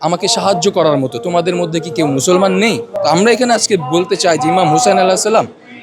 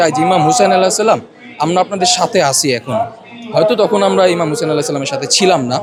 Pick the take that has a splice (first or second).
first